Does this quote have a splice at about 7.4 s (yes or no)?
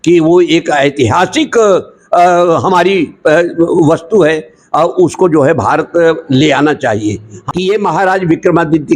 yes